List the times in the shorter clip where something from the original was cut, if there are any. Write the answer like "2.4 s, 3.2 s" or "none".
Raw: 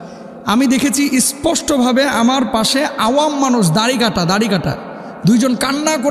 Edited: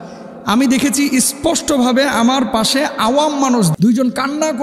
3.7 s

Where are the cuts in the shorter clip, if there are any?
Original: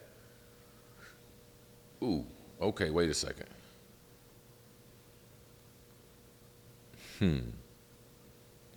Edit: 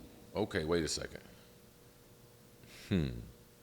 2.6 s

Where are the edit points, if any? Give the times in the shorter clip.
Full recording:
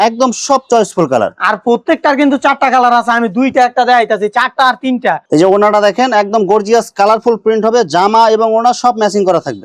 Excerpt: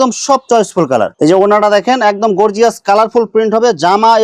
1.1 s

